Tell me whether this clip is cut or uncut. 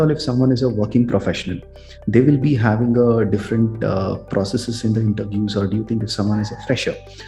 uncut